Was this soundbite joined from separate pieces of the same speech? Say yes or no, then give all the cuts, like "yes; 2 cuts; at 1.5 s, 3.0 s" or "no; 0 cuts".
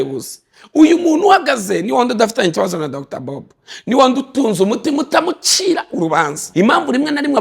yes; 1 cut; at 6.4 s